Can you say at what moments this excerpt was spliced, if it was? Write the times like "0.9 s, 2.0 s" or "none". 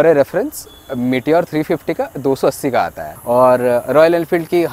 3.1 s